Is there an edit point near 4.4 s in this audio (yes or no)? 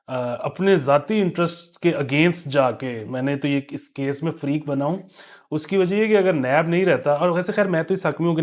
no